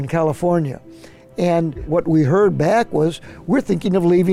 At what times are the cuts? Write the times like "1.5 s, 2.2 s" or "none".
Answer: 1.9 s